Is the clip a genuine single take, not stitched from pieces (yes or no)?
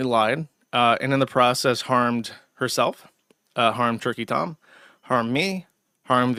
yes